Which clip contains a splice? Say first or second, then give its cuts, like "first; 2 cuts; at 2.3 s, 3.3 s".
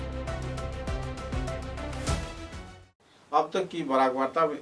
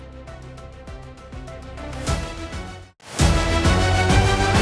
second; 1 cut; at 2.9 s